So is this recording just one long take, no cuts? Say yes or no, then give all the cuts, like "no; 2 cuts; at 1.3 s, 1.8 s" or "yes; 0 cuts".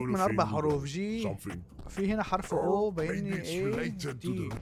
yes; 0 cuts